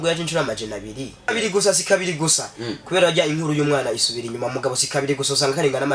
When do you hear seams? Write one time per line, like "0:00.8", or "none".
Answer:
0:01.3

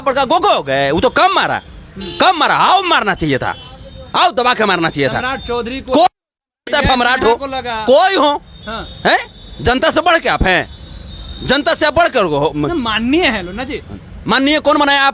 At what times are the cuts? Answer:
none

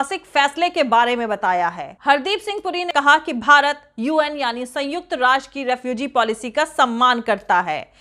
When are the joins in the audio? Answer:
0:01.9
0:02.9

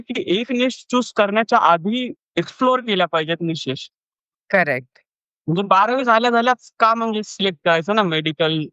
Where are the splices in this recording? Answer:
none

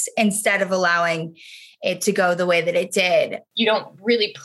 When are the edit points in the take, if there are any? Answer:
0:03.4

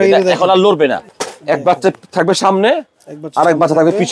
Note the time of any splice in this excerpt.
0:01.1

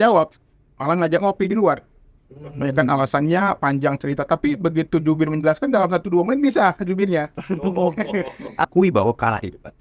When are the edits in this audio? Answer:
0:08.6

